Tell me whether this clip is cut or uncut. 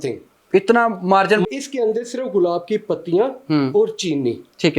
cut